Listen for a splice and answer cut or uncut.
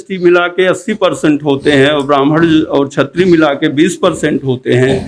uncut